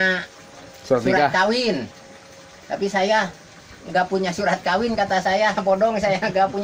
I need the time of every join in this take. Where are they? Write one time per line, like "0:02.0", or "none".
none